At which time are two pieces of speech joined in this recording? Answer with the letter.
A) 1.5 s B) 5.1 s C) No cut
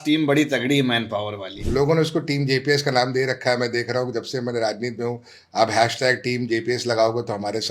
A